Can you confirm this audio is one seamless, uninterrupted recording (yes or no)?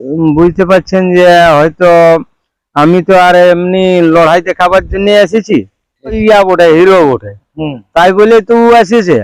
no